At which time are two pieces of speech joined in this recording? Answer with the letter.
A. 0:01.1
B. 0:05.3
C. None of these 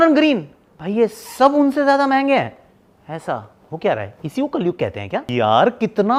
C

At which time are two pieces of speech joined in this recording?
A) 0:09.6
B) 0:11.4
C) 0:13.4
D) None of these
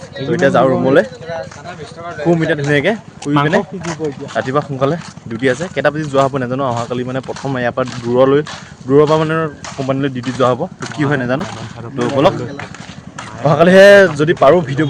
D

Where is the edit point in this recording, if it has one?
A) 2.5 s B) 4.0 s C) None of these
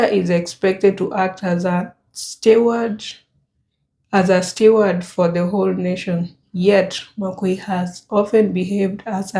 C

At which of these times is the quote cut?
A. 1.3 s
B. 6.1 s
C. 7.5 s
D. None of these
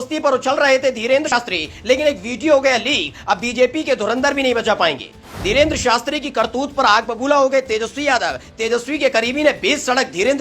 A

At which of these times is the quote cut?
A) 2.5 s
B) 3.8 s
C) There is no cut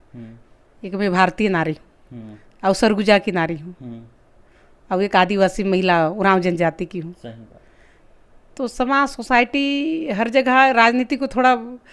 C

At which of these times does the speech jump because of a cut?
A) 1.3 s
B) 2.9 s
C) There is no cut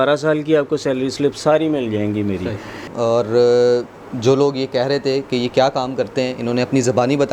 B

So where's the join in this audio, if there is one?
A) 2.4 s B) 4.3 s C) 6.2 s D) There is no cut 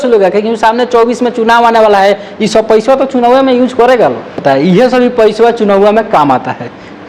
B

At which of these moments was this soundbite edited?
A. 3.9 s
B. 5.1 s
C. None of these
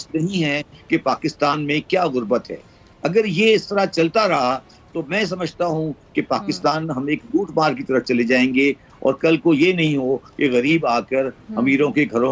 C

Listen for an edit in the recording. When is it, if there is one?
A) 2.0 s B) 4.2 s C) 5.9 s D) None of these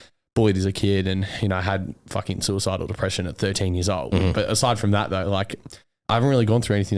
D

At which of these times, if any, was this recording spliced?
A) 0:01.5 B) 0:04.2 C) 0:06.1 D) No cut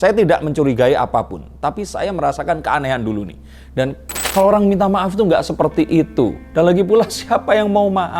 B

